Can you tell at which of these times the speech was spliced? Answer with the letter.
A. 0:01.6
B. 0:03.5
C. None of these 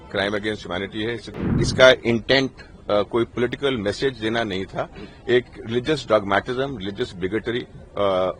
A